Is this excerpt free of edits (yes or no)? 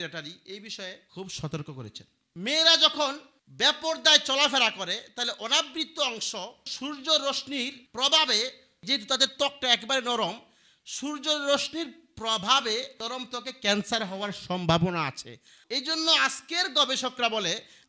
no